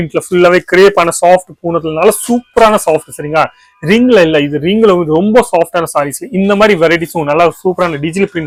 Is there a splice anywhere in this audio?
no; 0 cuts

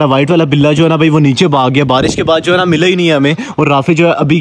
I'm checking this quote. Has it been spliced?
no; 0 cuts

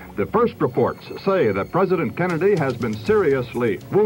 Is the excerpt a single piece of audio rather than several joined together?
yes; 0 cuts

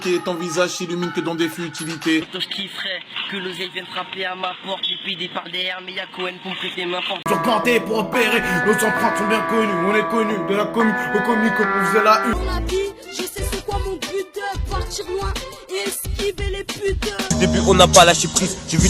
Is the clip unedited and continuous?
no; 4 cuts; at 2.4 s, 7.3 s, 12.3 s, 17.3 s

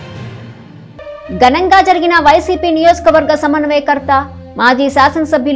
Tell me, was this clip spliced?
yes; 1 cut; at 1.2 s

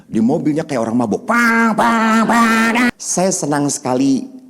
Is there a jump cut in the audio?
yes; 1 cut; at 2.9 s

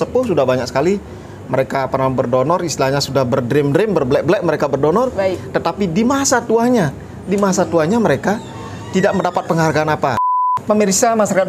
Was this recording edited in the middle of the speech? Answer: yes; 1 cut; at 10.2 s

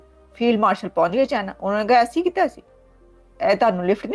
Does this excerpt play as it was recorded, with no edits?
yes; 0 cuts

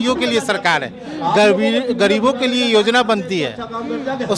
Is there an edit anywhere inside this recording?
no; 0 cuts

